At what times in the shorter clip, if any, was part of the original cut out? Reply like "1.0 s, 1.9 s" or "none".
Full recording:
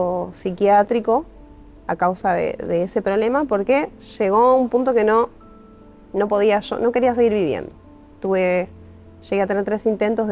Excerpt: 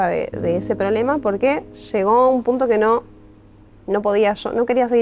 none